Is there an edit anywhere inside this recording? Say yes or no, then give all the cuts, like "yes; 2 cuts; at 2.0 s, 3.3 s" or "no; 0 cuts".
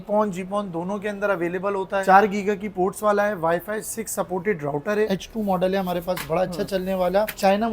yes; 2 cuts; at 2.0 s, 5.1 s